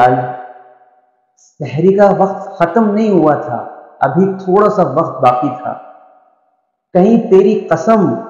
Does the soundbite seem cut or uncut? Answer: uncut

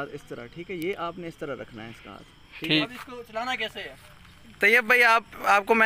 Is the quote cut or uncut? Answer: cut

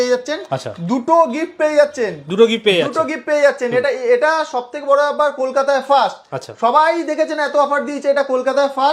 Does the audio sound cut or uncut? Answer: uncut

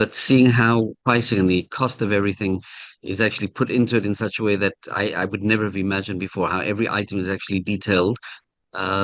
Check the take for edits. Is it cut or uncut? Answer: cut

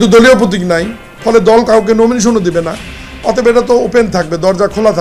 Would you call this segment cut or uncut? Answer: uncut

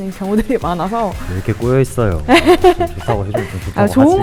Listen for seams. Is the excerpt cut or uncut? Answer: uncut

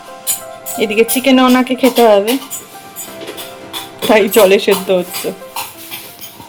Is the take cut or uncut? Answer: uncut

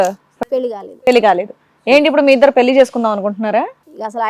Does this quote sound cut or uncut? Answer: uncut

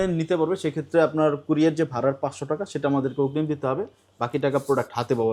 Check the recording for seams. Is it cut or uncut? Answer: uncut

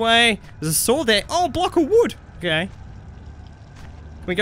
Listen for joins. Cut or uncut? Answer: cut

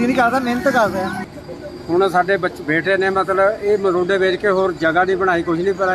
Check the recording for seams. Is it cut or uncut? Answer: cut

